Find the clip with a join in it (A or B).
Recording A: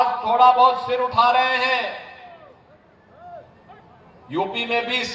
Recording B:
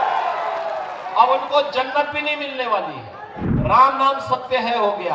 B